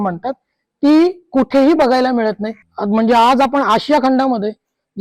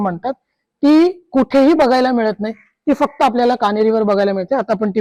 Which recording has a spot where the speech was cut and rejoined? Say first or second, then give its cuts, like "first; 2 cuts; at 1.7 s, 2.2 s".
first; 1 cut; at 2.7 s